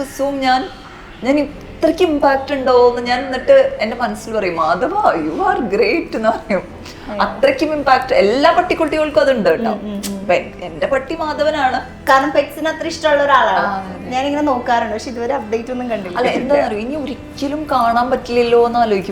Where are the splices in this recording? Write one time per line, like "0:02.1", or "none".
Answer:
0:12.0